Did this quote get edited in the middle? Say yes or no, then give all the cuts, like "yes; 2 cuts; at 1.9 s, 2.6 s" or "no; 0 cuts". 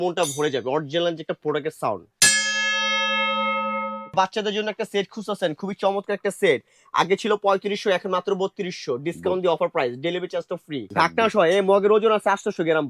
yes; 2 cuts; at 4.1 s, 10.9 s